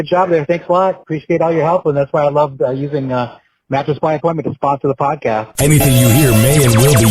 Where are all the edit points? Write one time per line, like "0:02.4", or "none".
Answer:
0:05.5